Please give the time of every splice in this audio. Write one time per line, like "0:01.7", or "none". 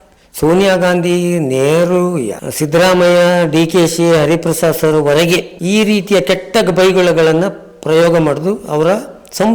0:02.4
0:05.5